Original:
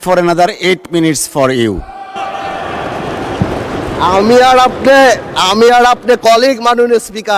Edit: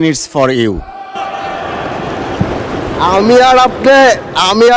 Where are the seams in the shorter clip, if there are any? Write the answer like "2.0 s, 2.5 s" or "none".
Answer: none